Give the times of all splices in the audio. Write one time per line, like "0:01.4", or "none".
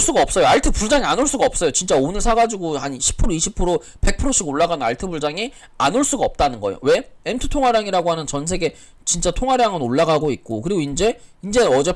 none